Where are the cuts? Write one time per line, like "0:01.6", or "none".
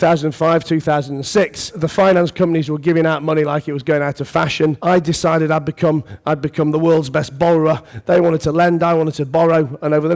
0:01.8
0:04.8